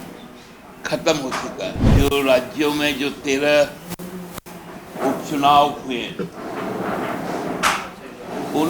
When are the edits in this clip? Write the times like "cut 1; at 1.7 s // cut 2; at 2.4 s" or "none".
cut 1; at 1.8 s